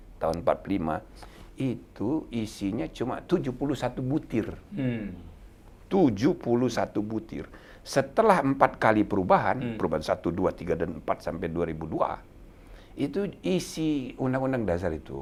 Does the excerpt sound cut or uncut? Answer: uncut